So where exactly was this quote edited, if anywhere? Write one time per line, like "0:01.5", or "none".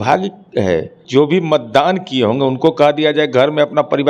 0:01.0

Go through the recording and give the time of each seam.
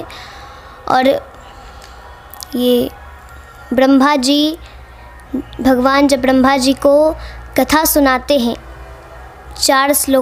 none

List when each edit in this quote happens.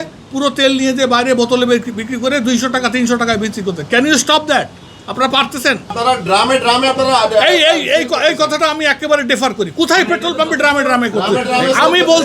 0:05.9

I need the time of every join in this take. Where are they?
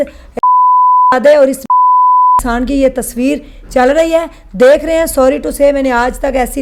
none

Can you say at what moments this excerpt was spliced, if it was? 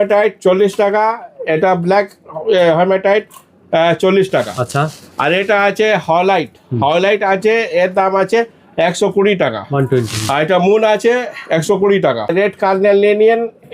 0:12.3

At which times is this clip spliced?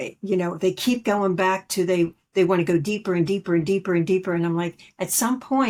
none

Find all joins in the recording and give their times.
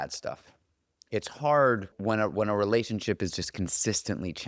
0:02.0

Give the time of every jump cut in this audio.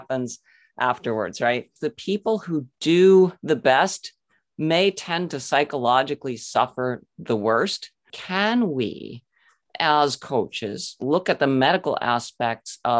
0:01.9
0:03.4
0:08.2

